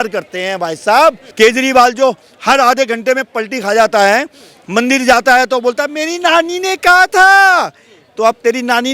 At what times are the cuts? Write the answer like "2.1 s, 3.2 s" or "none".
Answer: 1.2 s